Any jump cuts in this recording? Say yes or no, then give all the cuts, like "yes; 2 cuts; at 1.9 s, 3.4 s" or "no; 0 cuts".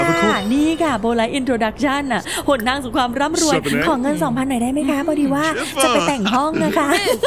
no; 0 cuts